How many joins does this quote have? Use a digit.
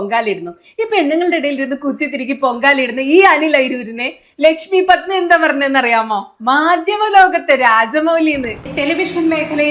0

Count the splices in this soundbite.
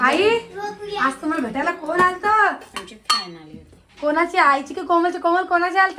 0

